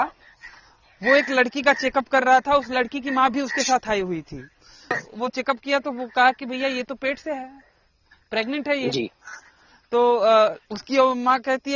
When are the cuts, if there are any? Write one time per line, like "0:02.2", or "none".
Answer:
0:05.0